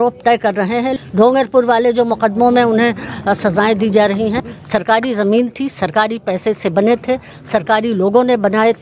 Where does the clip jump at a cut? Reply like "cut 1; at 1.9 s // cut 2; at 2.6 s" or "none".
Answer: cut 1; at 0.9 s // cut 2; at 4.5 s